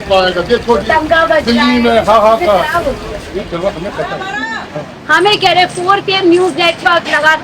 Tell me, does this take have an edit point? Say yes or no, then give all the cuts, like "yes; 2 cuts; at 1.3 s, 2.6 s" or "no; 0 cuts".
yes; 1 cut; at 4.9 s